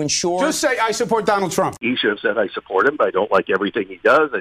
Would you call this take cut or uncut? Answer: cut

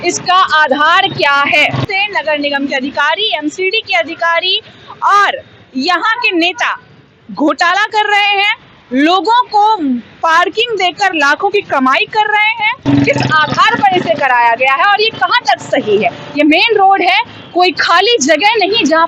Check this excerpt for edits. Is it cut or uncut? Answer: cut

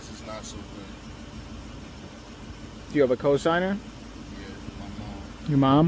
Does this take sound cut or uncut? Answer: uncut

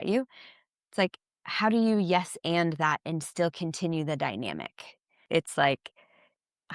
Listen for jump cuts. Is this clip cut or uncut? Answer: cut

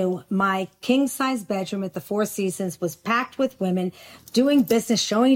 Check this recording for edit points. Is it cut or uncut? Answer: uncut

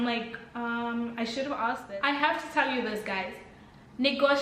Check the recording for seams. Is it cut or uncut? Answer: cut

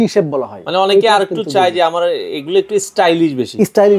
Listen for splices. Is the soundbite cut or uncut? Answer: uncut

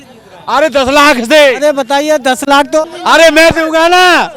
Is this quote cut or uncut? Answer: cut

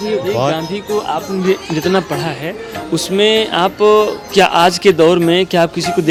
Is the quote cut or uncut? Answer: uncut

